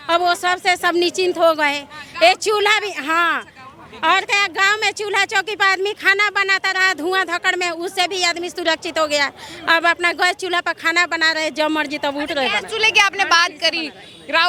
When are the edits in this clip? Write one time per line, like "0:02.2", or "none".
none